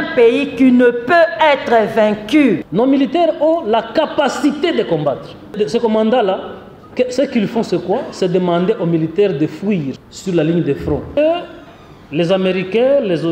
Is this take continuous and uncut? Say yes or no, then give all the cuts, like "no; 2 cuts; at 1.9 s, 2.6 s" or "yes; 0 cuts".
no; 4 cuts; at 2.7 s, 5.6 s, 10.1 s, 11.2 s